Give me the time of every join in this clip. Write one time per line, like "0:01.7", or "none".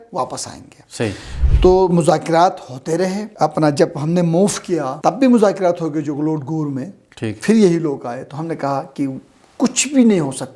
0:03.2
0:04.9

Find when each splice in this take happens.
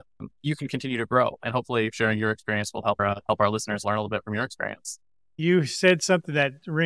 0:05.3

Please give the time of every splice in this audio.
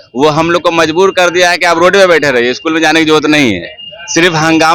none

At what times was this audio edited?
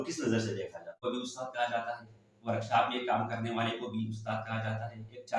0:01.0

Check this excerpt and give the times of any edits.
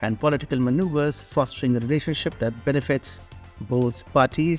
none

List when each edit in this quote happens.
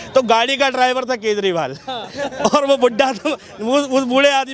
none

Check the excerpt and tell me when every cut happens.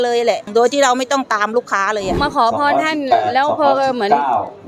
0:02.2

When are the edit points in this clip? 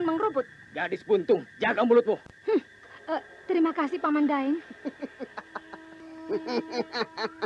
0:01.5
0:02.4
0:05.9

